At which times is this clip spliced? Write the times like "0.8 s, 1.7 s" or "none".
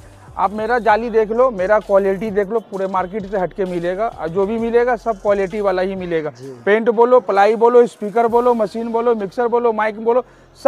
none

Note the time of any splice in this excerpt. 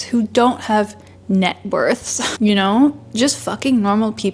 none

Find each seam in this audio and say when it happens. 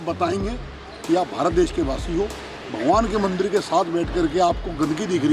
none

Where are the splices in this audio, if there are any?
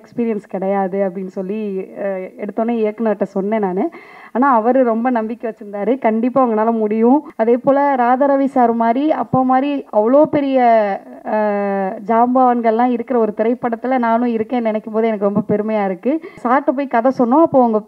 7.3 s, 16.4 s

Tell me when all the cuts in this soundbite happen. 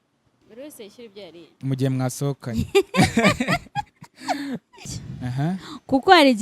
4.9 s

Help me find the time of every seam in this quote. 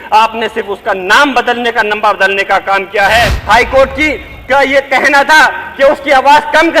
3.4 s

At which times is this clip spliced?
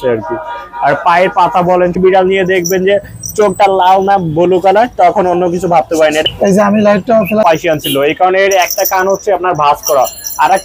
2.0 s, 7.4 s

